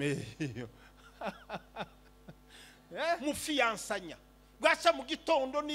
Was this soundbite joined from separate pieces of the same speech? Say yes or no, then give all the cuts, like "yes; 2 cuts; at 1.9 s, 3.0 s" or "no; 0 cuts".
yes; 1 cut; at 3.2 s